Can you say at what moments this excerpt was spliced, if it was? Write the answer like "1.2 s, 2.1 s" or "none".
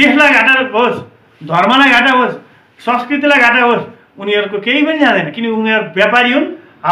none